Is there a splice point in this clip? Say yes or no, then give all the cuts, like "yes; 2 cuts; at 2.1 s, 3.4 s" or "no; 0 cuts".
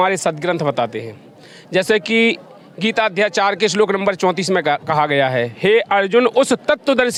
no; 0 cuts